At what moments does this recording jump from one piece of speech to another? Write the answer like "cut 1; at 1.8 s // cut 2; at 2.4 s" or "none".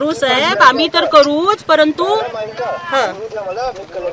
none